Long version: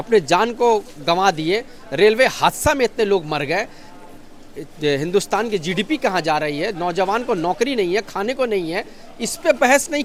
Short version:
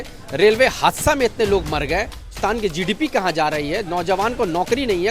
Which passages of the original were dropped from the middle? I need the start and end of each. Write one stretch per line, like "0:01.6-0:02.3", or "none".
0:04.0-0:05.3